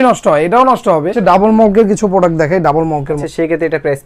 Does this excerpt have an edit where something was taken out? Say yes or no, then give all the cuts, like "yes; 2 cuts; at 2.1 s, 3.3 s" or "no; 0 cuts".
yes; 2 cuts; at 1.2 s, 3.2 s